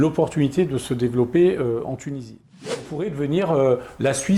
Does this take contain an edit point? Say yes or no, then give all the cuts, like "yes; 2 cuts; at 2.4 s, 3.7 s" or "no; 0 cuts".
yes; 1 cut; at 2.5 s